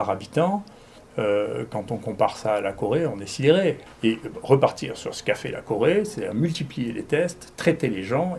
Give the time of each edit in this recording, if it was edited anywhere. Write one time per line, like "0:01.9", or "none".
0:03.9